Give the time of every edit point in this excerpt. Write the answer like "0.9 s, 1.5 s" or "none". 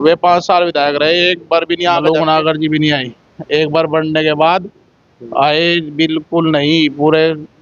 2.0 s